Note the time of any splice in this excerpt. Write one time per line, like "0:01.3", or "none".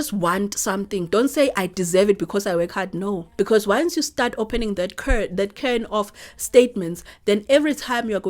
0:03.3